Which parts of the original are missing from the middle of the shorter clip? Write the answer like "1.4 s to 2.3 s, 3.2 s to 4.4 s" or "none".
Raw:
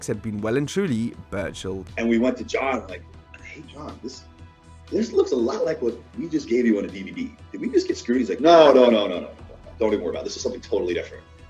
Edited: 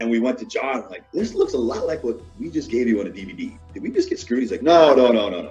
3.0 s to 4.7 s